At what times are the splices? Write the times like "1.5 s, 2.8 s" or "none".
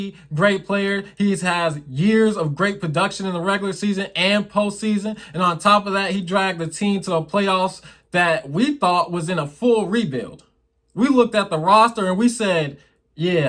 none